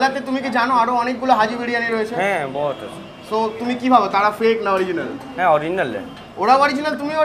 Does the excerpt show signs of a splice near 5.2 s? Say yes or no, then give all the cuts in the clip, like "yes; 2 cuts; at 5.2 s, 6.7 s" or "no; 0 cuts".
no; 0 cuts